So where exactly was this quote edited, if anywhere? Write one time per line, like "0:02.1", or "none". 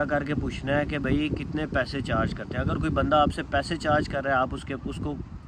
none